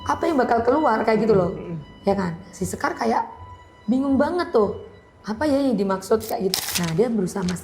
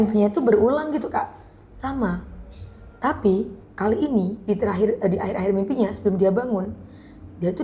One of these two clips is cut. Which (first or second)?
first